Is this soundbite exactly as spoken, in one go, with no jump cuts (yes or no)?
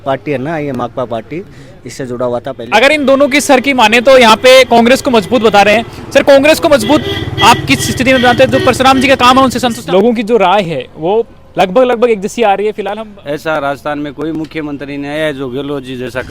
no